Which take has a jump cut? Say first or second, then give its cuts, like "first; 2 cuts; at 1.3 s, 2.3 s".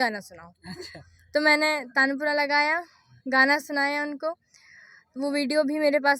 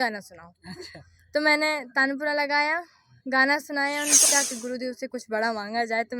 second; 1 cut; at 4.2 s